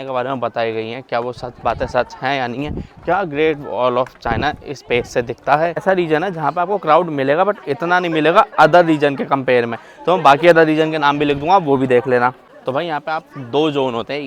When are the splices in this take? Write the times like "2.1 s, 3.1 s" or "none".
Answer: 5.8 s, 12.5 s